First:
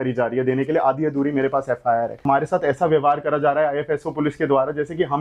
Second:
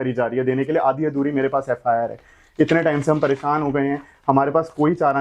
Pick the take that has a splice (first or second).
first